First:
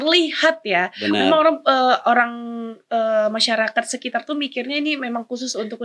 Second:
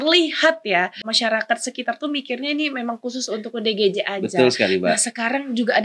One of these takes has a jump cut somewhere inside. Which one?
second; 1 cut; at 1.0 s

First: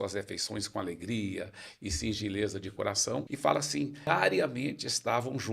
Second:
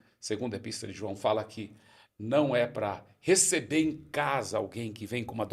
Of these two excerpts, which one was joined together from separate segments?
first; 2 cuts; at 3.3 s, 4.1 s

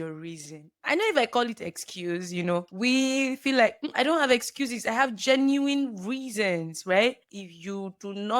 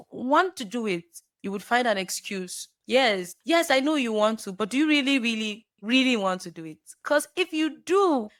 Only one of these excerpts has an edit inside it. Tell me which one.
first; 1 cut; at 7.2 s

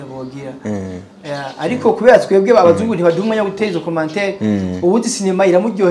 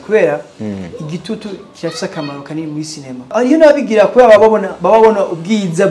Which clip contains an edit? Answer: second; 1 cut; at 3.3 s

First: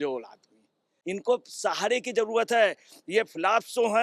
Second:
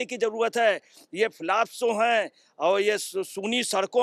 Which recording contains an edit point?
first; 1 cut; at 1.0 s

